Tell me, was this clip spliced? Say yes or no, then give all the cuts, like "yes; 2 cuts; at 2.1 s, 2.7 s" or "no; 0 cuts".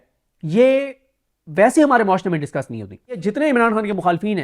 yes; 1 cut; at 3.2 s